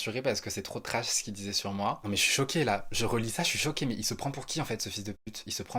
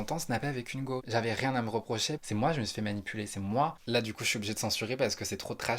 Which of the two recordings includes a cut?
second; 3 cuts; at 1.1 s, 2.2 s, 3.8 s

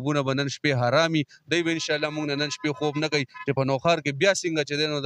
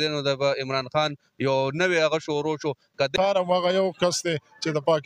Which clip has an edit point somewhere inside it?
second; 1 cut; at 3.1 s

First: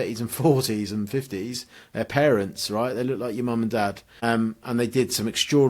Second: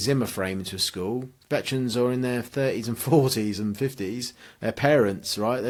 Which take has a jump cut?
first; 1 cut; at 4.1 s

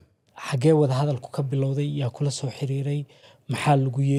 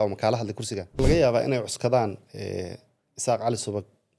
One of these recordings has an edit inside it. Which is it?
second; 1 cut; at 0.9 s

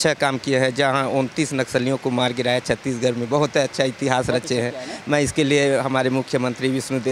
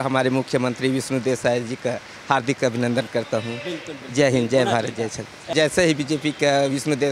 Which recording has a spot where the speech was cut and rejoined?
second; 1 cut; at 5.5 s

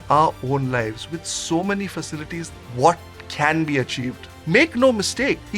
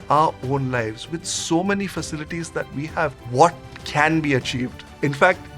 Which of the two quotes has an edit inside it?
first; 2 cuts; at 2.5 s, 4.3 s

